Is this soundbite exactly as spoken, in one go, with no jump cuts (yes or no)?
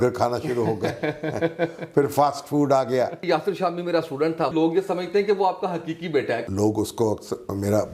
no